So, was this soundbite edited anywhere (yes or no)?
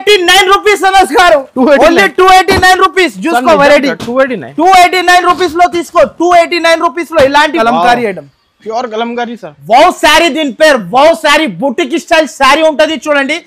yes